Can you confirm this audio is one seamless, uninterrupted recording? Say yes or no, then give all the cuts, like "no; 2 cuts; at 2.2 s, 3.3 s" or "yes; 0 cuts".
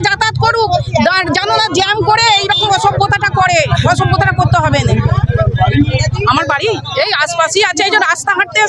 yes; 0 cuts